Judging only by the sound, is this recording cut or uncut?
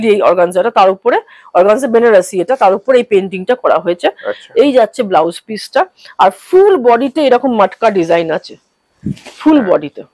uncut